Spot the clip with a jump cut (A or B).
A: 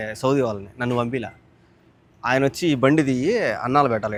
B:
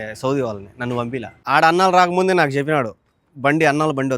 B